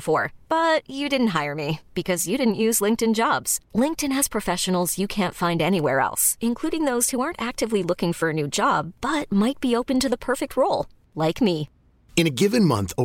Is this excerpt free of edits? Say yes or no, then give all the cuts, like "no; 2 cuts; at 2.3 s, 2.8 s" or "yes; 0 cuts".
yes; 0 cuts